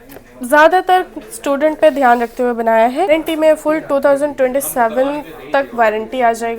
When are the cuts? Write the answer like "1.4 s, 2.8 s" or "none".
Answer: 3.1 s